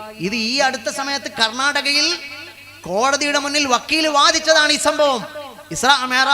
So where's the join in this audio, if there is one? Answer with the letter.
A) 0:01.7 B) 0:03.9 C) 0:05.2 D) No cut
D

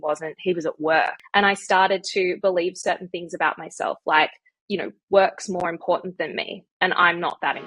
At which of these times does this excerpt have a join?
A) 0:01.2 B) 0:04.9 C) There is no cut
A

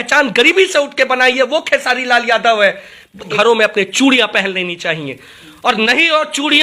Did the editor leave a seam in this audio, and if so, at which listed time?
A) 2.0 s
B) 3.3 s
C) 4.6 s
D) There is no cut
B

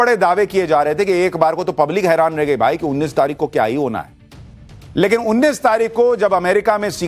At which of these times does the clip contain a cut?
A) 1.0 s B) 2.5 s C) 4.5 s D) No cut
A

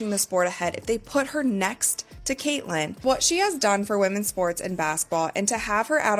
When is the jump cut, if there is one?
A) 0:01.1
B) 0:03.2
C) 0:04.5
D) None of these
B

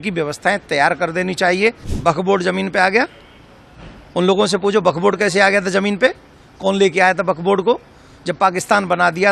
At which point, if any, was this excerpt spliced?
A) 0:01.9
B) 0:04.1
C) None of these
A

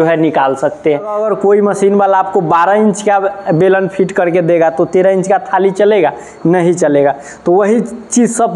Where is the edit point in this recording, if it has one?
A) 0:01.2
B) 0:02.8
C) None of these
A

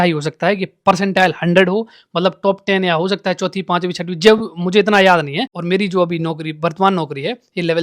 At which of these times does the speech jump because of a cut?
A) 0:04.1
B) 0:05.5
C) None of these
B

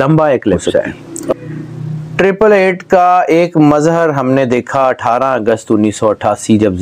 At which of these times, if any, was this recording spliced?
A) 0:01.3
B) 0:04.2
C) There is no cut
A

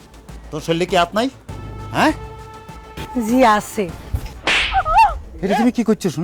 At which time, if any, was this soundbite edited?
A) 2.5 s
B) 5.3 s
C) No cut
B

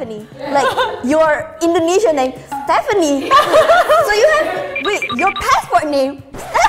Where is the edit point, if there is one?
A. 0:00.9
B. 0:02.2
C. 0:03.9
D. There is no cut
D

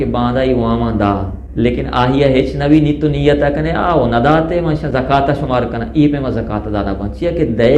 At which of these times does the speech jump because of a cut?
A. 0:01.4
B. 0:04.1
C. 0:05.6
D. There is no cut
A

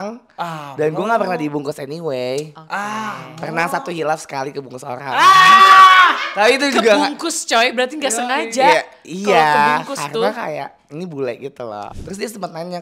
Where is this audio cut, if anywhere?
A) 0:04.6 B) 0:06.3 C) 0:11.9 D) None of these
C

